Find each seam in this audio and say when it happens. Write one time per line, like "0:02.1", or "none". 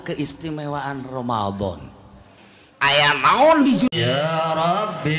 0:03.9

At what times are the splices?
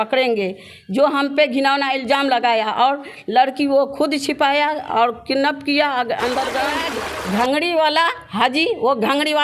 0:06.9

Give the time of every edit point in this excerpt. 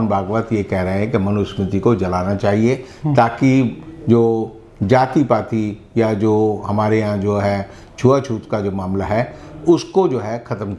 none

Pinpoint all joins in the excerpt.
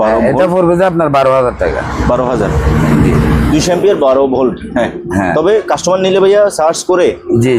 none

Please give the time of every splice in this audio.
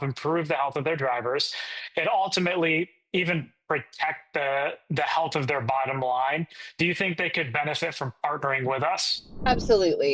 none

